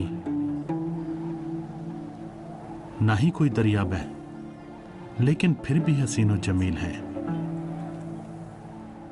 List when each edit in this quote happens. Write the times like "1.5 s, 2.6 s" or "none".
4.1 s